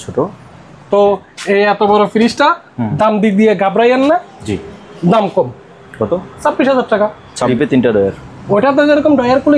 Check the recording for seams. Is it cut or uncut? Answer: cut